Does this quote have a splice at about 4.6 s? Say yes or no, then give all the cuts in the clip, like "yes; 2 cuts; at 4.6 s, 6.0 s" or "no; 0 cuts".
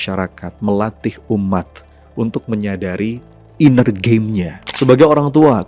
yes; 1 cut; at 4.6 s